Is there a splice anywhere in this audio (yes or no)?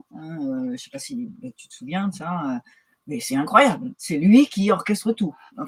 no